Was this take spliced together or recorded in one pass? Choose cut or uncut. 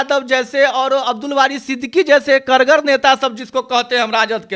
uncut